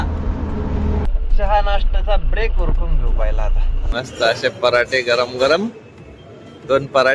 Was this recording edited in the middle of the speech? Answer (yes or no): yes